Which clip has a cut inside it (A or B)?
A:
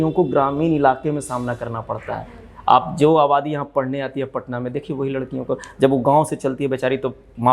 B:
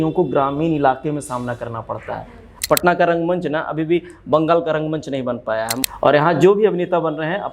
B